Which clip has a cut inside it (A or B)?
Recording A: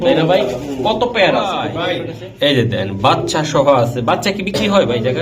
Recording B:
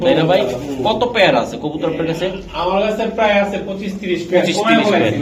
A